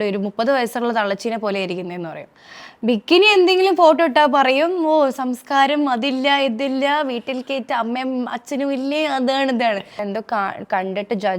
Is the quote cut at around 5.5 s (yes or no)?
no